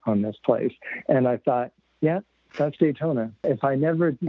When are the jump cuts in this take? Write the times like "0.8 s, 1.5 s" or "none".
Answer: 1.8 s, 3.4 s